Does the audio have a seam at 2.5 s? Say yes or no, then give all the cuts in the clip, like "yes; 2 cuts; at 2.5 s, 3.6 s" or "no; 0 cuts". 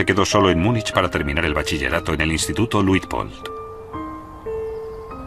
no; 1 cut; at 1.2 s